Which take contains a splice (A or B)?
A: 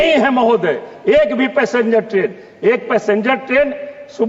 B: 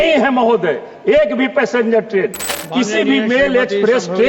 B